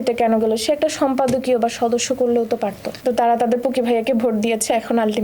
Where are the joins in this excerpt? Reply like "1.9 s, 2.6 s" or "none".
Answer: 2.9 s